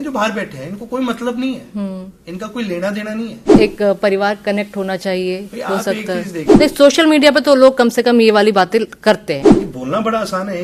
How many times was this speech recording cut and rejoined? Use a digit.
3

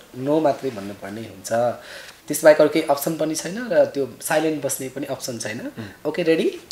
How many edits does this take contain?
0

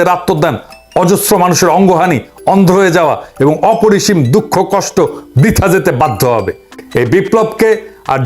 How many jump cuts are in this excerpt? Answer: 1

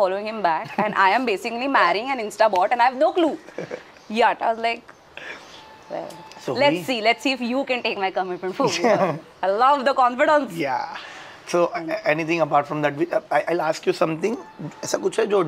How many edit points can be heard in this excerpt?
0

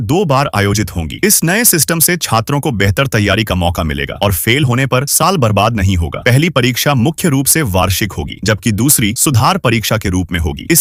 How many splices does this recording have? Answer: 0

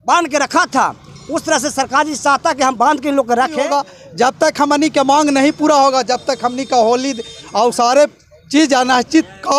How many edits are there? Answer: 1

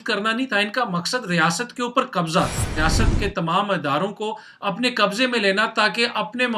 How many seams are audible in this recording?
1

